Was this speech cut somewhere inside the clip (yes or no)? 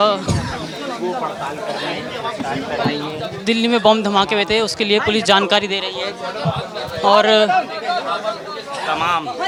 no